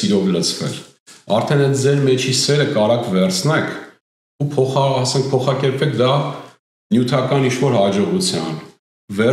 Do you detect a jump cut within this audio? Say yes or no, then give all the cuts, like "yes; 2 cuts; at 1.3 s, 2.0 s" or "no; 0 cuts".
no; 0 cuts